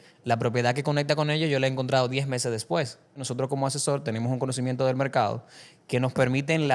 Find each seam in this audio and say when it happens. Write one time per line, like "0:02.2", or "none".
0:03.2

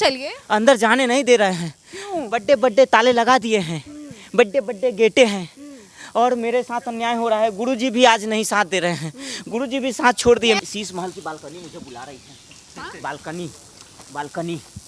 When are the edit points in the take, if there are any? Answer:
0:10.6

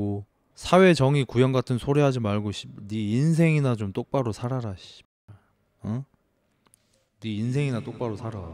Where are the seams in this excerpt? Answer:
none

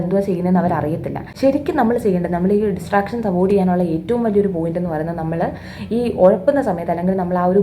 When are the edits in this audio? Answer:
0:01.2

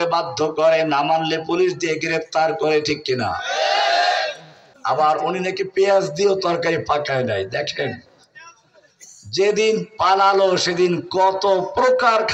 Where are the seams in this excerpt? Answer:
0:04.7

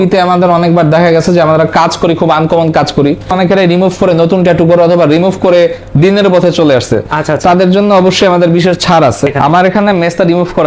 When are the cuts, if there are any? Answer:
0:03.3
0:09.3

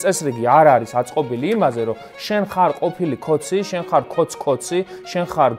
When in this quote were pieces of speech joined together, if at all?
none

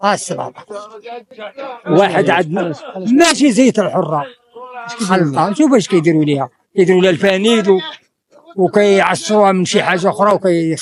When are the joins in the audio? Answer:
none

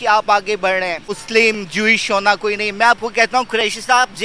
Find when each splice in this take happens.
0:01.2

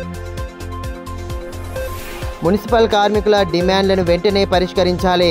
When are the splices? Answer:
0:01.3

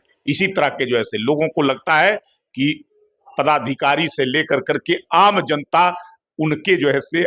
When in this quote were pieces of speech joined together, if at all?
none

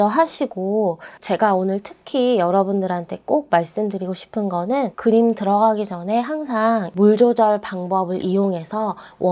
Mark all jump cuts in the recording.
0:01.1
0:04.9
0:06.9

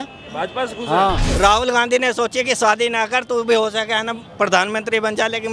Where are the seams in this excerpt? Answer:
0:01.3

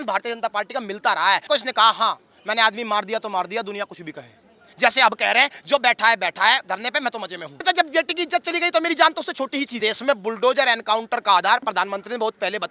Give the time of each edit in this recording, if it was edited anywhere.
0:01.5
0:07.6
0:09.8

